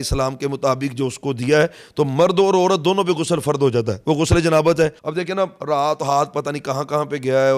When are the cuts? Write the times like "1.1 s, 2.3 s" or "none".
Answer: 5.0 s